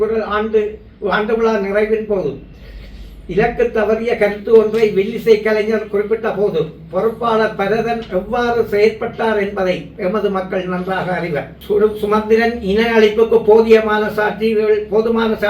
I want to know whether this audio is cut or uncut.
cut